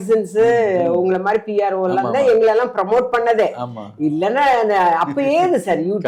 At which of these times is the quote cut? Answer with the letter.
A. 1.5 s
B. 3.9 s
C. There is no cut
C